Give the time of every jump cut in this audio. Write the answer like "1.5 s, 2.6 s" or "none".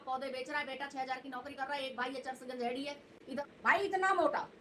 3.2 s